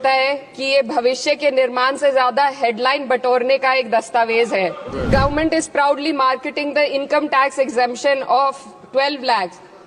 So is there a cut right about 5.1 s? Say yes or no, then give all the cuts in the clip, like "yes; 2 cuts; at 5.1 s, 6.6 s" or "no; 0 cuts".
yes; 1 cut; at 5.1 s